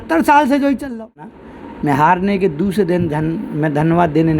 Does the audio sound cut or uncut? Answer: cut